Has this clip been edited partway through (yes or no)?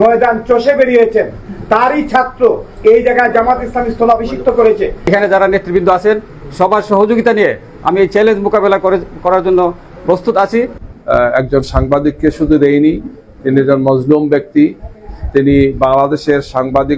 yes